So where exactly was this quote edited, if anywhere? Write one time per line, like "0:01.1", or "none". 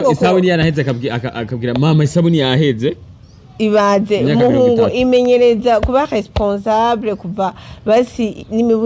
none